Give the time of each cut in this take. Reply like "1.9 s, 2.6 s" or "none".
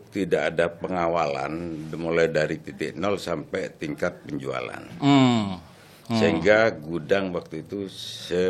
none